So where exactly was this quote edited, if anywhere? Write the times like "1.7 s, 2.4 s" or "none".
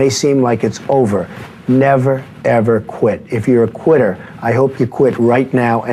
none